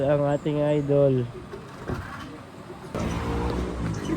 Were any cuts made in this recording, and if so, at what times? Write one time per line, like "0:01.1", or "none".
0:02.9